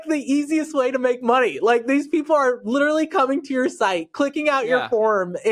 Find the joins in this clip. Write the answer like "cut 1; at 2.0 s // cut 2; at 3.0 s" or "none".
none